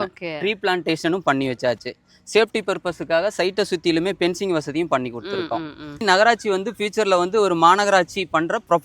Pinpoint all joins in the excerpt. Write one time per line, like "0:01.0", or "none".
0:06.0